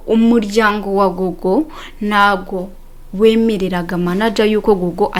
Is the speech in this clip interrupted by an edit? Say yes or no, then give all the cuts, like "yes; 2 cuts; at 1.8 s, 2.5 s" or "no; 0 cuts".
no; 0 cuts